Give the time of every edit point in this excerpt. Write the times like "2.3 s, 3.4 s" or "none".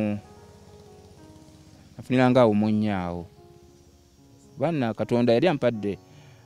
4.5 s